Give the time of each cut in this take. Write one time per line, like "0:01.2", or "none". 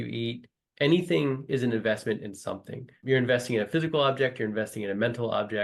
0:03.0